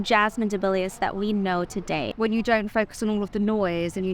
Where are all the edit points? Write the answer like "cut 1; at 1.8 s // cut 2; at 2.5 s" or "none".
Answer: cut 1; at 2.1 s